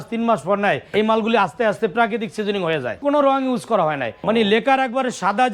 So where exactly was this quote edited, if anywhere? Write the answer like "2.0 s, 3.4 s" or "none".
0.8 s, 3.0 s, 4.1 s